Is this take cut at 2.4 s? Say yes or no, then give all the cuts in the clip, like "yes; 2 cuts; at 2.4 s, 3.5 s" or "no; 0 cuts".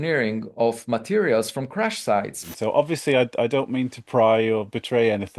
yes; 1 cut; at 2.4 s